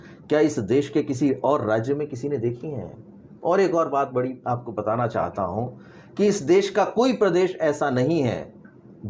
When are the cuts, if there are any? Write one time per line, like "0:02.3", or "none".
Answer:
none

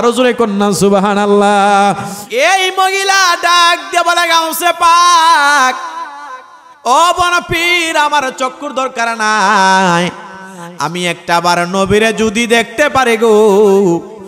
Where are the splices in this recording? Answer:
0:02.1

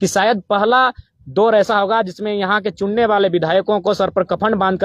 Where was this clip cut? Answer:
none

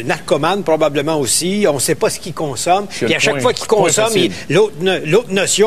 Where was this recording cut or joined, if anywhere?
none

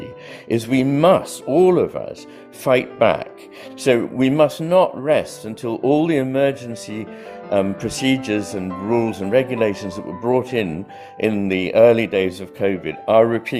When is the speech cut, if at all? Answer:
none

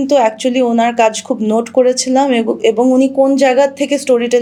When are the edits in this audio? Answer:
none

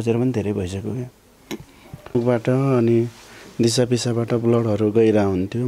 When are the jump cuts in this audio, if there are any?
0:02.2

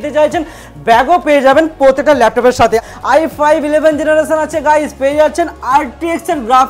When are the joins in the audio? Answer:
0:02.8

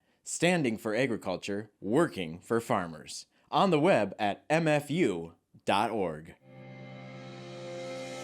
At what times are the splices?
0:06.5

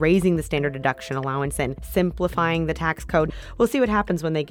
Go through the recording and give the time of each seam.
0:01.8
0:03.3

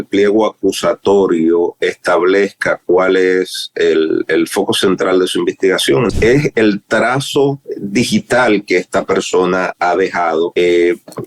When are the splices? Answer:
0:06.1
0:07.7
0:10.5

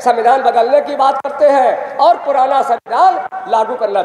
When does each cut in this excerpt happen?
none

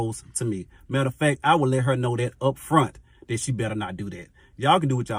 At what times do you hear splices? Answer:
none

